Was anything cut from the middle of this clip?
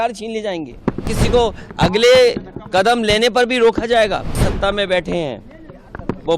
yes; 2 cuts; at 1.2 s, 4.5 s

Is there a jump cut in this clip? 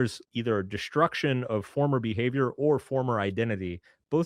no; 0 cuts

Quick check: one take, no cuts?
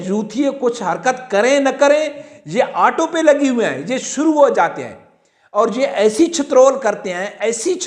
yes; 0 cuts

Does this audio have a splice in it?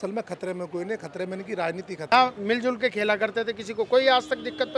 yes; 1 cut; at 2.1 s

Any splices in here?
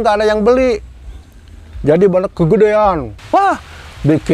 yes; 1 cut; at 3.1 s

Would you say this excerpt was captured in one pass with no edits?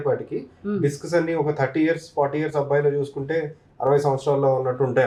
yes; 0 cuts

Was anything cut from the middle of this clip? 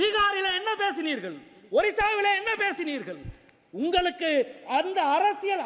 no; 0 cuts

